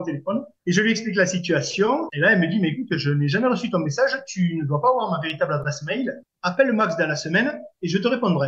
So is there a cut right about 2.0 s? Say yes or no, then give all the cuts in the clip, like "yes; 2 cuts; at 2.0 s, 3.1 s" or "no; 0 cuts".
no; 1 cut; at 6.3 s